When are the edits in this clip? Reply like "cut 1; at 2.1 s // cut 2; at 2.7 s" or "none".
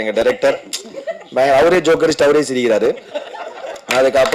none